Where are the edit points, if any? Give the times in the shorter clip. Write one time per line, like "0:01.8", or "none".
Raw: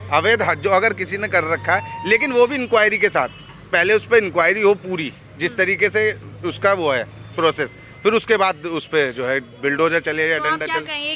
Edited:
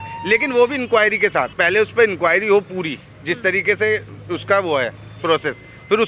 0:01.5